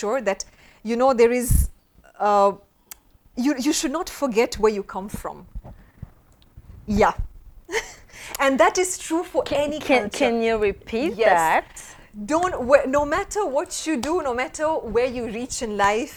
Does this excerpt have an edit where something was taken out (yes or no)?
no